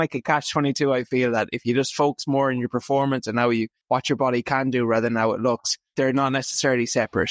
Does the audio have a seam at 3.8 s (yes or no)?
yes